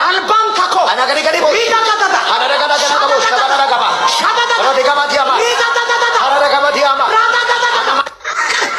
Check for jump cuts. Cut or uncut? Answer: uncut